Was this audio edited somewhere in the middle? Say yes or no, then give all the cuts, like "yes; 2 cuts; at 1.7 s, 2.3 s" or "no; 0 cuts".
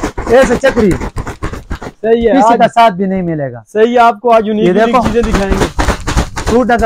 no; 0 cuts